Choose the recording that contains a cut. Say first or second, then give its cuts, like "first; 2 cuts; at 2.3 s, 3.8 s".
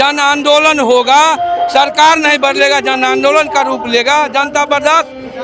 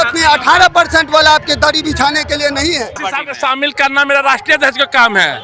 second; 1 cut; at 3.0 s